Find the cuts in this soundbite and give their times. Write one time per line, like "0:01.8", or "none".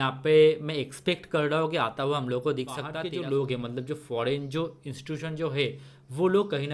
0:02.9